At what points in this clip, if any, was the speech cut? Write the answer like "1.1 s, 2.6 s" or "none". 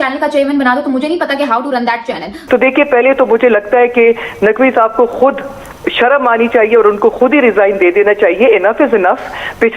2.3 s